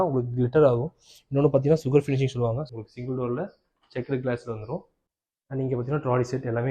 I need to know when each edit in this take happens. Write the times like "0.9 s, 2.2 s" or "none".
2.7 s, 5.0 s